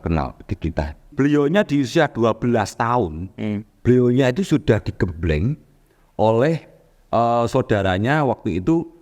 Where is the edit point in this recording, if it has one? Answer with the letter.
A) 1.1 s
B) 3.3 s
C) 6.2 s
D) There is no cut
A